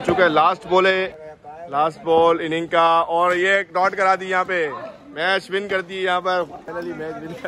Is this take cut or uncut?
cut